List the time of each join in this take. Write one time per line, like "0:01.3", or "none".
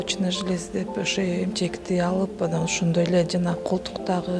none